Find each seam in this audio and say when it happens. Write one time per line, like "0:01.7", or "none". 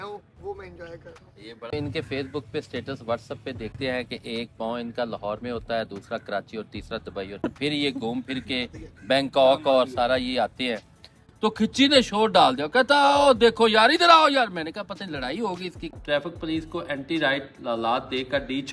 0:01.7
0:03.7
0:07.4
0:11.2
0:16.0